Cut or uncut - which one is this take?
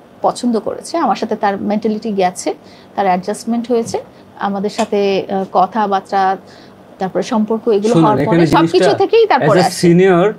uncut